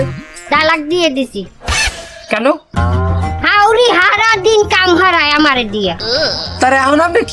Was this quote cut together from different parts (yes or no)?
no